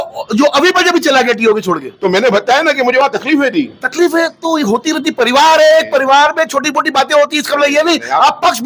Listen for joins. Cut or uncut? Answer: uncut